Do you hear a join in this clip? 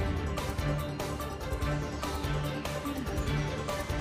yes; 1 cut; at 1.7 s

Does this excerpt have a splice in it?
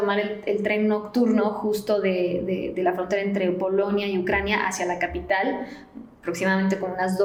no; 0 cuts

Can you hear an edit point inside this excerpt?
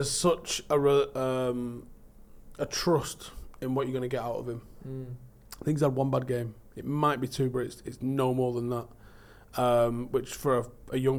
no; 0 cuts

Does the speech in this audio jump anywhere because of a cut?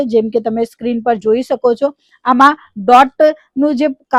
no; 0 cuts

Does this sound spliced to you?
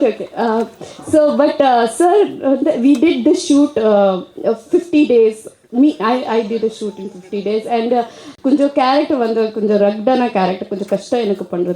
no; 0 cuts

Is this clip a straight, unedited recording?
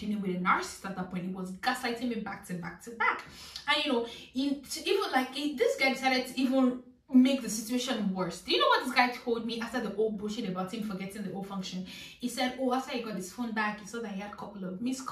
yes; 0 cuts

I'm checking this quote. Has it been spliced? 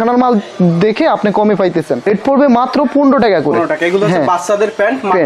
yes; 1 cut; at 2.0 s

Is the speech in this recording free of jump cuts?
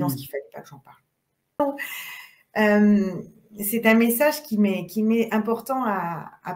no; 1 cut; at 1.6 s

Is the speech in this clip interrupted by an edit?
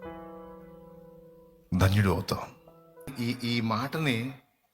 yes; 1 cut; at 3.1 s

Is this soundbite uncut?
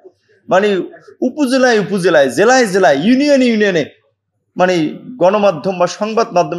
yes; 0 cuts

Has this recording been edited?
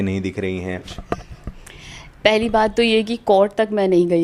yes; 1 cut; at 0.9 s

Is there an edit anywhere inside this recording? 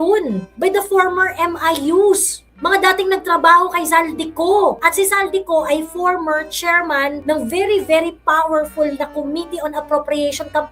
no; 0 cuts

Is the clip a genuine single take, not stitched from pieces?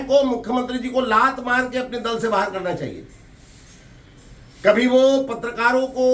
yes; 0 cuts

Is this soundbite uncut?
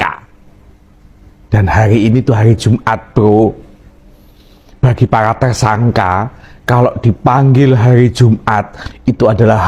yes; 0 cuts

